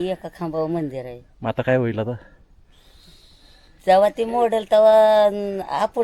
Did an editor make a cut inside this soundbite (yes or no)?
no